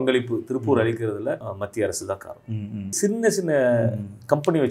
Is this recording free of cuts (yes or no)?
no